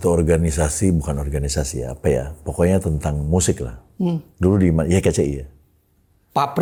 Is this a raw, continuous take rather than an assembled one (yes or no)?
yes